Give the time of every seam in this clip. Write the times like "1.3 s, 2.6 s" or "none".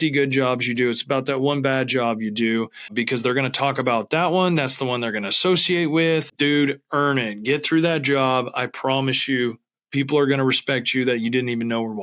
2.9 s, 6.3 s